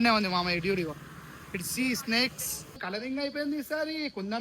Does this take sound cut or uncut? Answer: cut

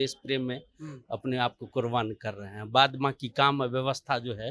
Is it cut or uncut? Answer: uncut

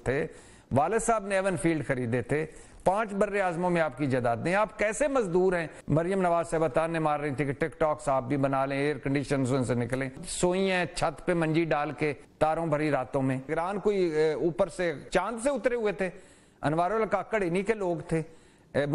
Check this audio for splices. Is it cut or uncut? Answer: cut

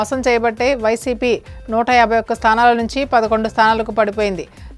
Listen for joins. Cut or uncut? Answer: uncut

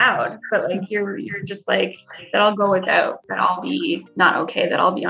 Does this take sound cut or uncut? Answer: cut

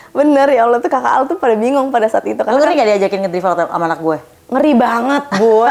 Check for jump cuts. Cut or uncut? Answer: cut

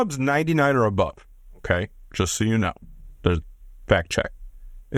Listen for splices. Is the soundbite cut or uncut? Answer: uncut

